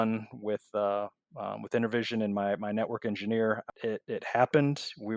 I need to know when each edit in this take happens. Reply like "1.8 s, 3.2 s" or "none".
3.7 s